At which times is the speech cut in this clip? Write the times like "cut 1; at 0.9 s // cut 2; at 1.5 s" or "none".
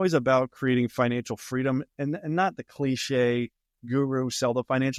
none